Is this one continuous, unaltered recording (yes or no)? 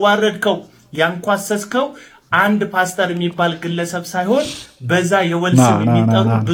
yes